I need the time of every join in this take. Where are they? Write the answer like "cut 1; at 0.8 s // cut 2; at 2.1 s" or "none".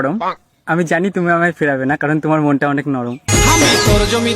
cut 1; at 3.2 s